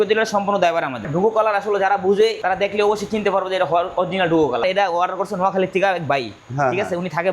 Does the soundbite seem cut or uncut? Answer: cut